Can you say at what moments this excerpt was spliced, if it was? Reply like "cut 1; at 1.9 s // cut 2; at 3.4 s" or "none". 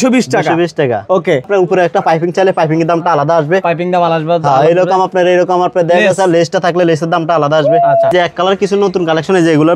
cut 1; at 1.5 s // cut 2; at 8.1 s